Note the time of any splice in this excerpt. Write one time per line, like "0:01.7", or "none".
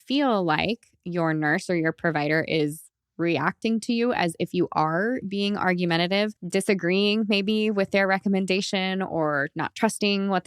0:06.4